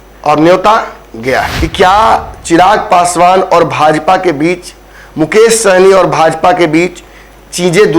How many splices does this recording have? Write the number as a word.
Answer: one